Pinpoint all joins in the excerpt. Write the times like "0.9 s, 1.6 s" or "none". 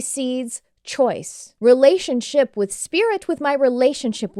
1.4 s